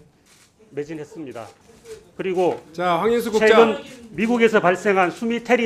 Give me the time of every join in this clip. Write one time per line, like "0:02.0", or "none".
0:01.7

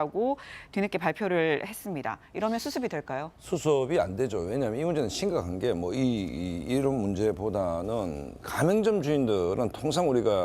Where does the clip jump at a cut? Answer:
none

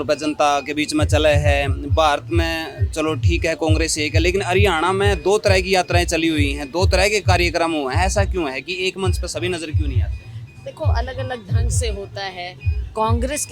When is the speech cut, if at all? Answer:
none

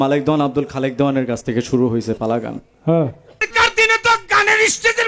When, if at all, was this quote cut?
0:03.5

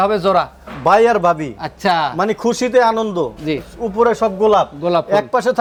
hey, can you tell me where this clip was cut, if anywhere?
none

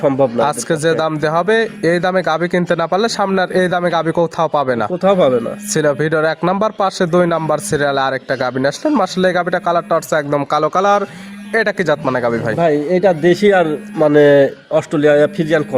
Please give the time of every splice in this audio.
none

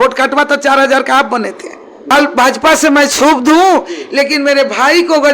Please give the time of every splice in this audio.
0:02.1

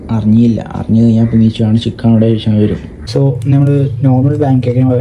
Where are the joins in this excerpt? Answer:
0:02.9

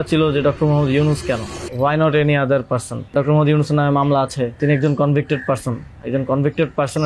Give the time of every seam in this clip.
0:01.6
0:03.1
0:04.6

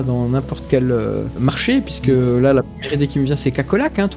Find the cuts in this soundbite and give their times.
0:01.6

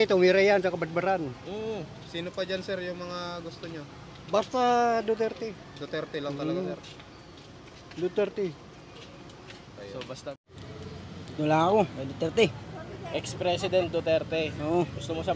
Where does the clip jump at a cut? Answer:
0:10.4

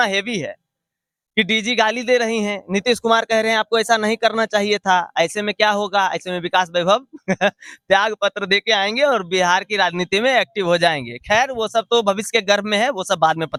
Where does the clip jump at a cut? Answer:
none

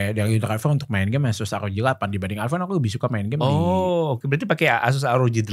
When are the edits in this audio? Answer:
none

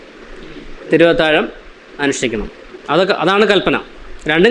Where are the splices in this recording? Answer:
none

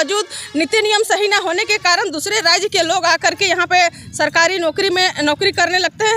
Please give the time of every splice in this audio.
none

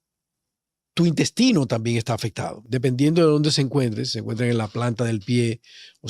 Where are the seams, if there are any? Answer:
0:02.5

